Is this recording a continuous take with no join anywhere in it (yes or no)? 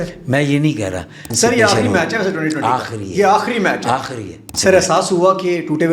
no